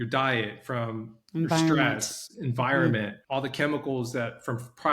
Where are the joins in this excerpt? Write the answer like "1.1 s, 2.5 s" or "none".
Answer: 3.2 s